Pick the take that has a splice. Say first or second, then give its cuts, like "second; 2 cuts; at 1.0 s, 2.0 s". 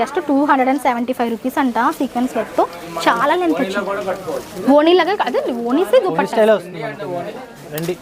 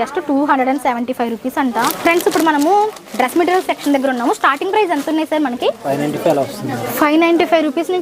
second; 2 cuts; at 1.9 s, 5.8 s